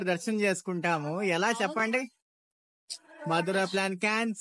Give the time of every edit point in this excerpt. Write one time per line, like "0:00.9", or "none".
none